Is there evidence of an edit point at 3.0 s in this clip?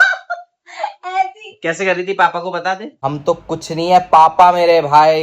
yes; 1 cut; at 3.0 s

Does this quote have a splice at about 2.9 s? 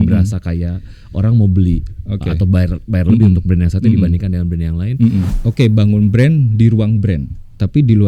no; 1 cut; at 5.4 s

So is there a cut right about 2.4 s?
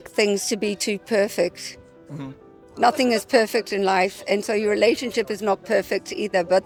no; 0 cuts

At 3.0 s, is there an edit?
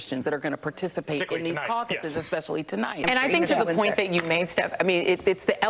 yes; 1 cut; at 3.0 s

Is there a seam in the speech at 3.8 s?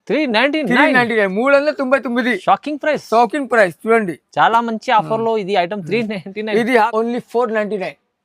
no; 1 cut; at 6.9 s

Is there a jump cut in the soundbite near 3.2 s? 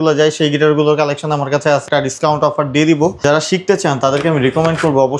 yes; 2 cuts; at 1.8 s, 3.2 s

